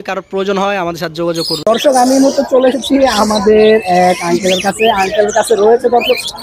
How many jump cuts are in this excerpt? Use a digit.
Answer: 1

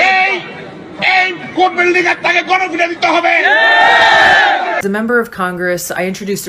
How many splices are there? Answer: 1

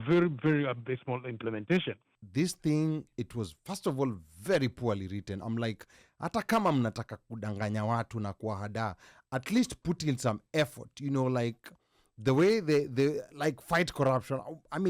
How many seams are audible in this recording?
1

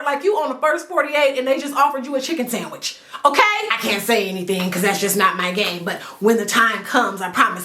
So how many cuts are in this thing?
1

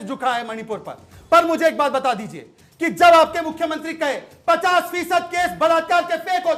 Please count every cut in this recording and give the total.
0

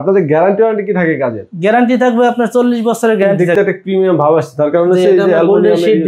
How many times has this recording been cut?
1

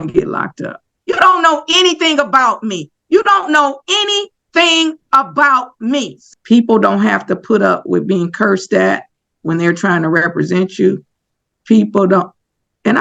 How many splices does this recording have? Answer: 2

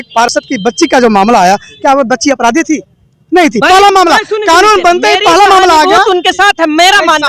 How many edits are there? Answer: 0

